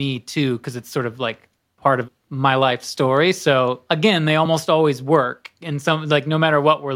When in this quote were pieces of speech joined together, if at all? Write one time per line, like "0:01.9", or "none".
0:02.2
0:03.8